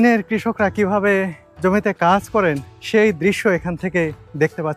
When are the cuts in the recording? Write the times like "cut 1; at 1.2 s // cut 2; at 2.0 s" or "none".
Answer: cut 1; at 1.4 s // cut 2; at 2.7 s